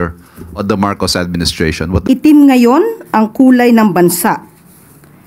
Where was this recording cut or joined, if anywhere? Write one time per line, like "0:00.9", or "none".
0:02.0

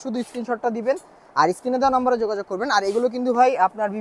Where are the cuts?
none

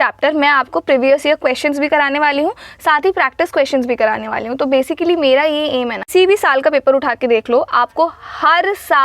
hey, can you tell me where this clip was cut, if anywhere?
0:06.1

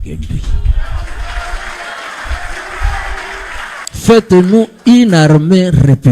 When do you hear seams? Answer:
0:03.8

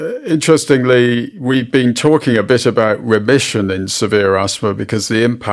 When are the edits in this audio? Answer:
0:01.3

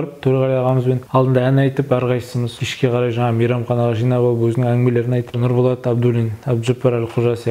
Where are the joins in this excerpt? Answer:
0:01.0
0:02.4
0:05.4

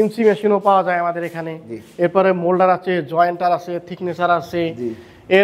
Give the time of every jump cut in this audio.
none

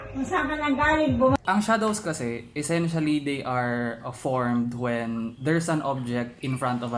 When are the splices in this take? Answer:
0:01.4

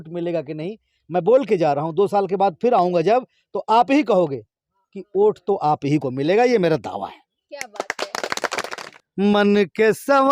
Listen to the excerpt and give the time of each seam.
0:08.7

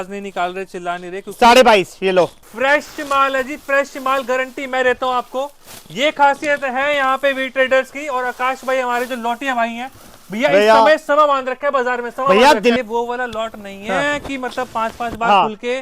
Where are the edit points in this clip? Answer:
0:02.5
0:12.8

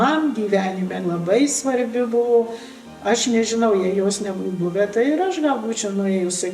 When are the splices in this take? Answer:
none

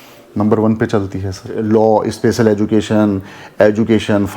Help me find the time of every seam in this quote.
0:01.6

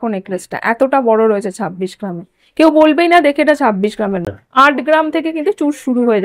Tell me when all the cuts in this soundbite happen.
0:04.4

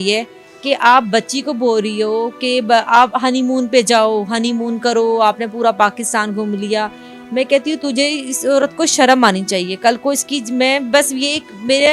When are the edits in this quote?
none

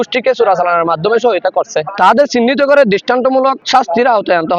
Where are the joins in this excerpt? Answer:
0:01.9
0:03.6

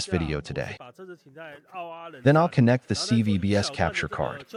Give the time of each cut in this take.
none

